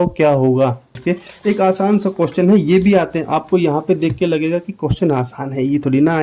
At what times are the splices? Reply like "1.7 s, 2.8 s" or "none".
1.0 s